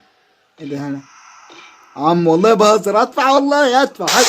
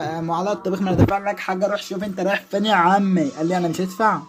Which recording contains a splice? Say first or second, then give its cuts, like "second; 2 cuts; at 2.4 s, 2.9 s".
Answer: first; 1 cut; at 2.5 s